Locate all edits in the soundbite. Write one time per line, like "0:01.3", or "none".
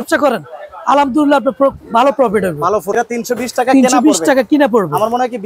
0:02.9